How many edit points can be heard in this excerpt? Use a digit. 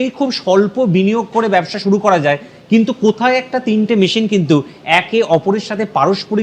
0